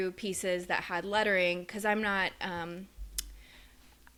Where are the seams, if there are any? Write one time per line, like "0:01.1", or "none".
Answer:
none